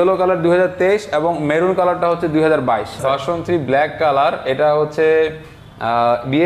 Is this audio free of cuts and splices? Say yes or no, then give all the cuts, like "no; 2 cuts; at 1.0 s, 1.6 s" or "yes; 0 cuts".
no; 1 cut; at 3.0 s